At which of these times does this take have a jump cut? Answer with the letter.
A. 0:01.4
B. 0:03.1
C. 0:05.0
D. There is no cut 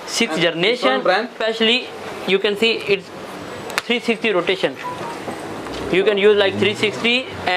A